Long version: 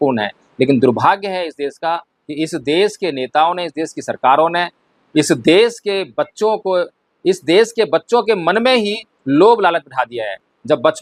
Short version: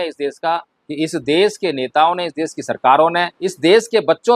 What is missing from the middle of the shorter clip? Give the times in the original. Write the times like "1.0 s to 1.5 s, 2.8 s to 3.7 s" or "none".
4.8 s to 7.3 s